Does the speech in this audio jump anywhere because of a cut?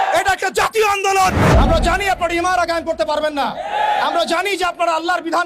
yes; 1 cut; at 1.4 s

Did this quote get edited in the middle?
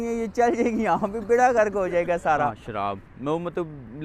yes; 1 cut; at 2.6 s

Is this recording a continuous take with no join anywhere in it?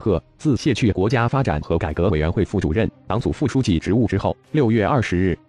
yes; 0 cuts

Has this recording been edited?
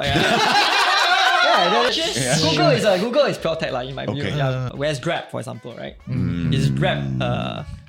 yes; 2 cuts; at 1.9 s, 4.7 s

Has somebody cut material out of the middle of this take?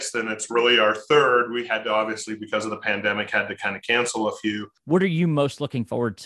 yes; 1 cut; at 4.7 s

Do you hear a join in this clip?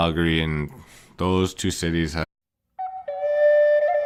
no; 0 cuts

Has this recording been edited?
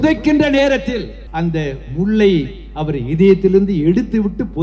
yes; 1 cut; at 1.2 s

